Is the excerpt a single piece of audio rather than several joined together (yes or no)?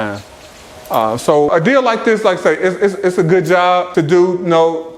no